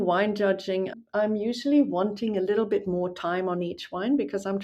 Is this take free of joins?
no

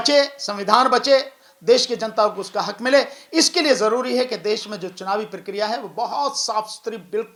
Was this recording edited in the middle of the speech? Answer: no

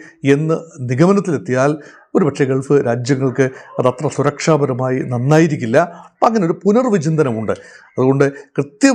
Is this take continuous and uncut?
yes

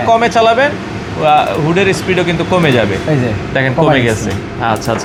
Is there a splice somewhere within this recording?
no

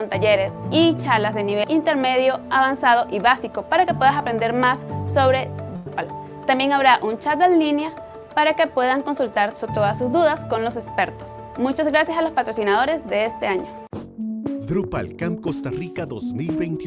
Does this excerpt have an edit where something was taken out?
no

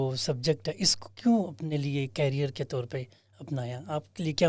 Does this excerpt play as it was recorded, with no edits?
yes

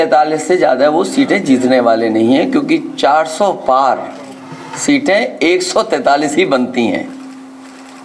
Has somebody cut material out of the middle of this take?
no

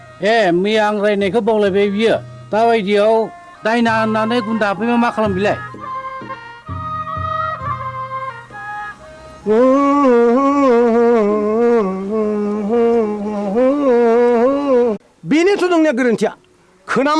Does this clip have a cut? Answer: yes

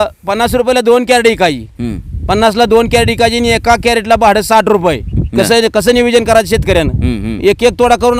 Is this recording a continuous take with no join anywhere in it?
yes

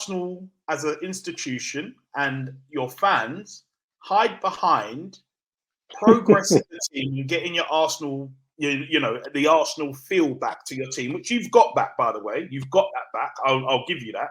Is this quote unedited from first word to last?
yes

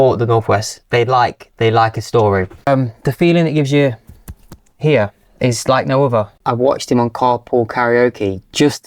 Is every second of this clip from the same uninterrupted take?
no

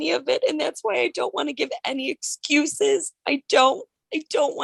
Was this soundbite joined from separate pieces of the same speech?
no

